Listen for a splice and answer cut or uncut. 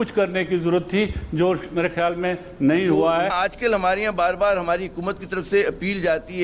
cut